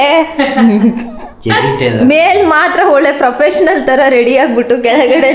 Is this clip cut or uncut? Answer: cut